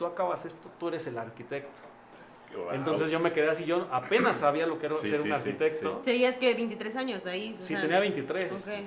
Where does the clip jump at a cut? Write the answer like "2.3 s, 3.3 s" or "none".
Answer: none